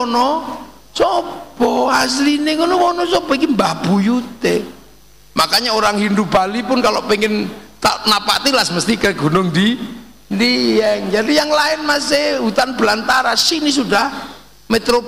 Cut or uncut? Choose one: uncut